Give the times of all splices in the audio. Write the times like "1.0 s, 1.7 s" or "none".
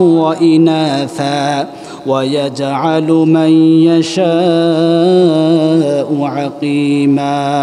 none

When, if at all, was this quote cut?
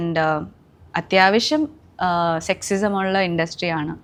none

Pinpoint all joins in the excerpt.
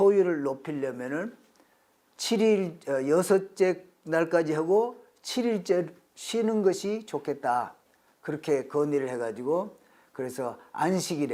none

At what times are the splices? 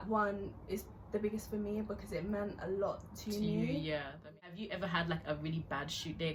none

